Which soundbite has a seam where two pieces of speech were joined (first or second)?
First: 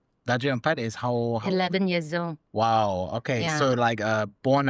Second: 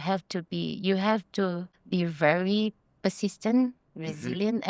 second